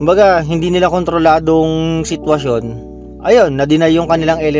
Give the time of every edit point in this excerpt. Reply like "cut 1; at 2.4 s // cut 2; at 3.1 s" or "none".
none